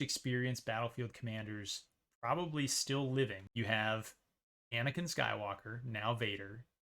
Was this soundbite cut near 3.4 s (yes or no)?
yes